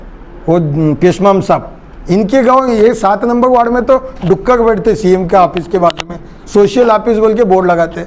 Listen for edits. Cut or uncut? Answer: uncut